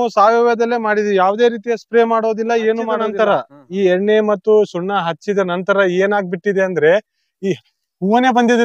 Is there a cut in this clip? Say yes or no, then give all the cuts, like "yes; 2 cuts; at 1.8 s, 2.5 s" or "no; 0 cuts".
yes; 1 cut; at 3.1 s